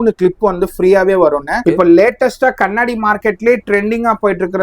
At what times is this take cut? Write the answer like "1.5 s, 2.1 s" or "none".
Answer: 1.5 s

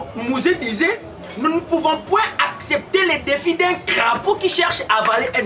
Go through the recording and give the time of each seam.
none

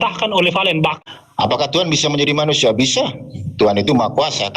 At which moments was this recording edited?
1.0 s

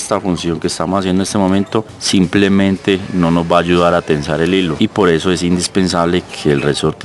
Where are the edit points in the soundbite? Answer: 2.0 s, 4.7 s

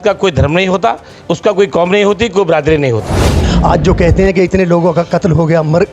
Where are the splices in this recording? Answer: 3.4 s

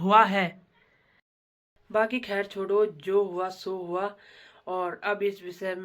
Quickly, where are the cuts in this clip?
1.4 s

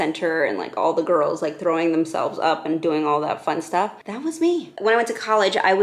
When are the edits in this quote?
4.7 s

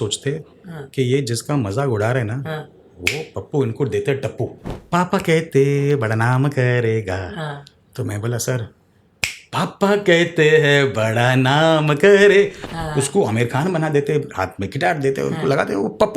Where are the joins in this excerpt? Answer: 4.7 s, 12.6 s

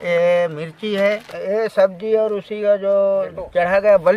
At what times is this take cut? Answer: 1.3 s

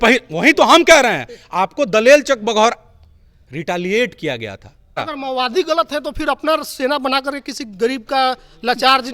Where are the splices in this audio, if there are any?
5.0 s

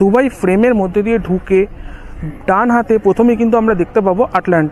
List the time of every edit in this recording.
none

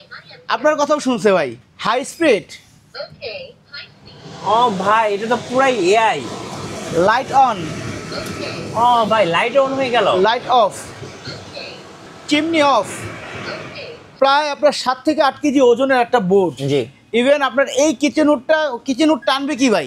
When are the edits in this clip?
1.6 s, 12.1 s, 14.1 s

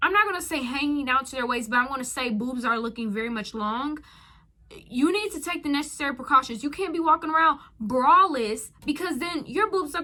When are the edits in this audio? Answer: none

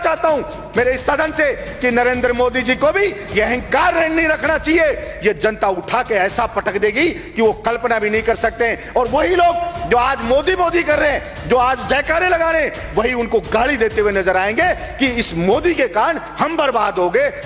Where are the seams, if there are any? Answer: none

